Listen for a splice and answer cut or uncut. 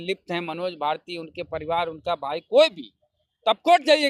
uncut